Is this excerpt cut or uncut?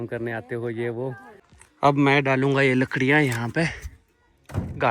cut